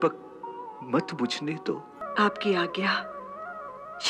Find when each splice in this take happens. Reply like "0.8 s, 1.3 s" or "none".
2.0 s